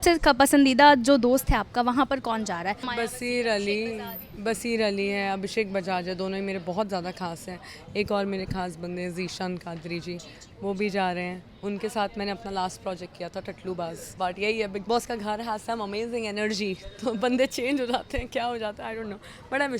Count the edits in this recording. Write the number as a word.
two